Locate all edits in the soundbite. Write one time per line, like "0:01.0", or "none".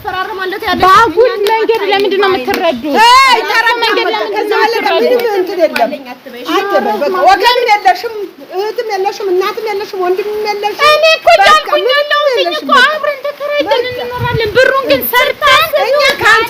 none

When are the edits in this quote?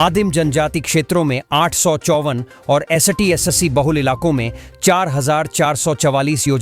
none

